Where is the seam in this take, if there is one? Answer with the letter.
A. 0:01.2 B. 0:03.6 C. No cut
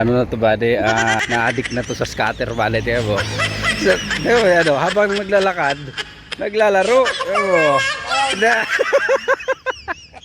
A